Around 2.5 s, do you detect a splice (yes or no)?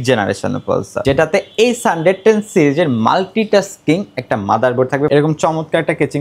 no